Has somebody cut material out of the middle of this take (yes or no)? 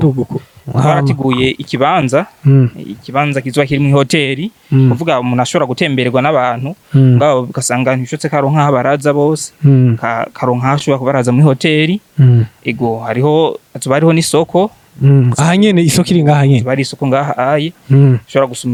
no